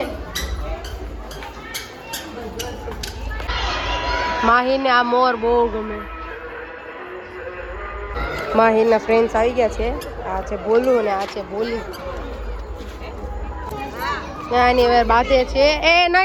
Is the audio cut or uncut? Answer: uncut